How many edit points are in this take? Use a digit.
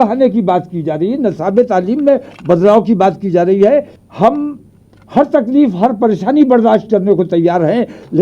1